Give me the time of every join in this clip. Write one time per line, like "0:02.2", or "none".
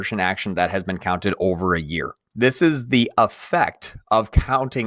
0:02.2